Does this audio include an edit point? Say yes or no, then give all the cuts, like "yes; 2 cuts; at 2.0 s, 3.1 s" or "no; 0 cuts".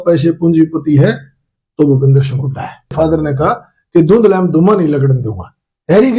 yes; 1 cut; at 2.9 s